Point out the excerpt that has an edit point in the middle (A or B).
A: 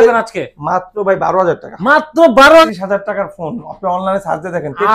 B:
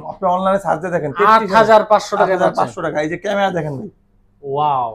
A